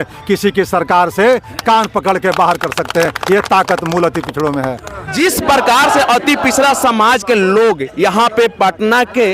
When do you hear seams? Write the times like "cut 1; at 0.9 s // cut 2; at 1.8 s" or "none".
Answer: none